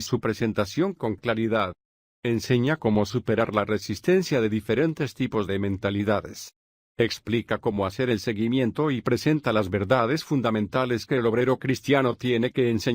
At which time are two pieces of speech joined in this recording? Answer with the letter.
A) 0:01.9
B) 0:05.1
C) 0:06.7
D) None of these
D